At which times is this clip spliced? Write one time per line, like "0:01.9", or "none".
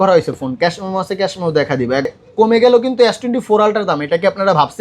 0:02.1